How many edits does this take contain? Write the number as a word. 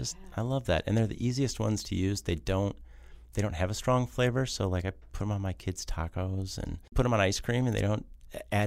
one